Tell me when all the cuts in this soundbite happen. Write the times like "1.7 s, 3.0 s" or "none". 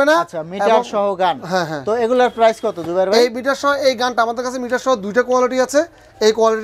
none